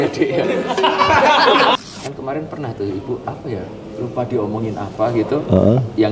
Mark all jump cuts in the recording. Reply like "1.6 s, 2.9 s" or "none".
1.8 s